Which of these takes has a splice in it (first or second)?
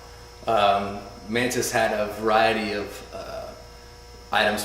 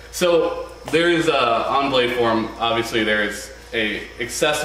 first